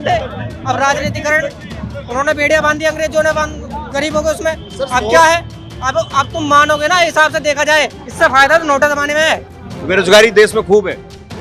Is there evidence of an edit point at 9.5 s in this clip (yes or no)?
yes